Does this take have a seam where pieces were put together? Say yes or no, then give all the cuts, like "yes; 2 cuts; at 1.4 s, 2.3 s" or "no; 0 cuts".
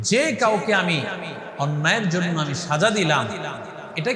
no; 0 cuts